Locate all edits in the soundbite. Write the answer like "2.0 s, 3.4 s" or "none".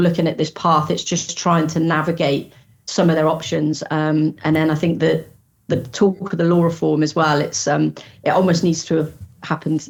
none